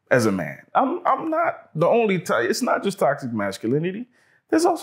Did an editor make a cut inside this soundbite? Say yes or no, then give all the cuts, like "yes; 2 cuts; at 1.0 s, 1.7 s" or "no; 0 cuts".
no; 0 cuts